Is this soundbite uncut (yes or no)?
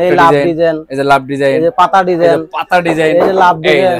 yes